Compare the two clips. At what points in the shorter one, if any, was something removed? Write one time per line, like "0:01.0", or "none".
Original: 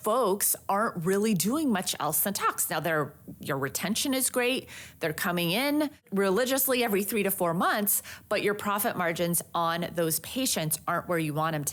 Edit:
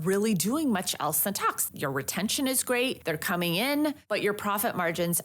0:01.6
0:03.0
0:04.0